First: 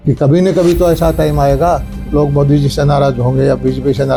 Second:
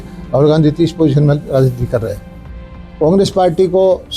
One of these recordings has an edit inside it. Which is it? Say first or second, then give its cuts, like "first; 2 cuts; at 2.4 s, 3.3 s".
second; 1 cut; at 2.5 s